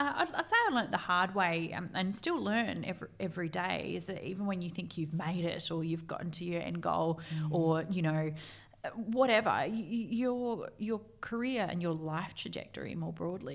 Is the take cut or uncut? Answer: uncut